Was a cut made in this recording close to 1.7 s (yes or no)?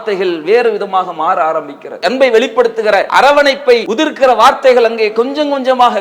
no